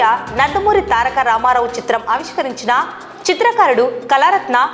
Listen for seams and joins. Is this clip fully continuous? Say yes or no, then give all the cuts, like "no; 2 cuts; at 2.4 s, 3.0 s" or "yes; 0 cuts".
yes; 0 cuts